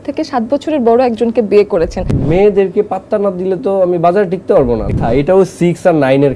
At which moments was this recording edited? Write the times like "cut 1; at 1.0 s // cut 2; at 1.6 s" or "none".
cut 1; at 2.2 s // cut 2; at 4.9 s